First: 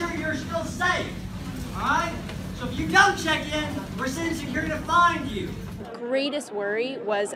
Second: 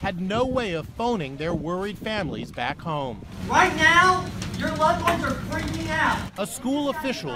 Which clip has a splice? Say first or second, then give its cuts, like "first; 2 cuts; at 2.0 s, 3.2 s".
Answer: second; 1 cut; at 4.8 s